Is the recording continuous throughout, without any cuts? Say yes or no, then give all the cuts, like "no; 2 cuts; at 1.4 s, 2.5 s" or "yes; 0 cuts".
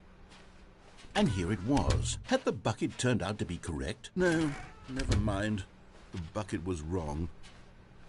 no; 2 cuts; at 1.1 s, 4.1 s